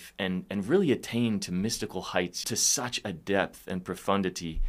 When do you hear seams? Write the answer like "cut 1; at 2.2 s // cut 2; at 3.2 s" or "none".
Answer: cut 1; at 2.4 s